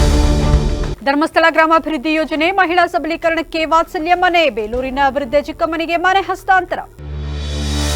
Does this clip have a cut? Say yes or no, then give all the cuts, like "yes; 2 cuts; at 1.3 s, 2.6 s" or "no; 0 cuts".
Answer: no; 0 cuts